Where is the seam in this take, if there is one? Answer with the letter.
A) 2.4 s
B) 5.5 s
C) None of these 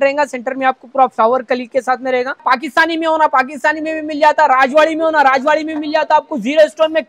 A